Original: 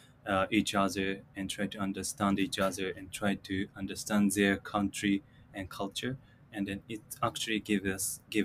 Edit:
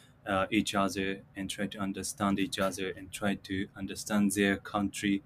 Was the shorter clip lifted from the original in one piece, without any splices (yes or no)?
yes